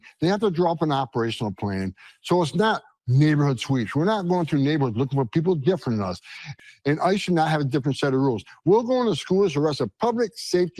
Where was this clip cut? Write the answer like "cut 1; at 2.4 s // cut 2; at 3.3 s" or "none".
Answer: cut 1; at 6.4 s